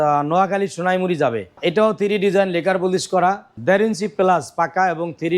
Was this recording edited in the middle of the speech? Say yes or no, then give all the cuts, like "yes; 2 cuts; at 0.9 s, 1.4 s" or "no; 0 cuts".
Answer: yes; 2 cuts; at 1.6 s, 3.5 s